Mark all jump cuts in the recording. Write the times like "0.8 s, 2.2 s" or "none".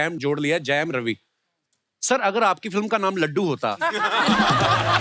none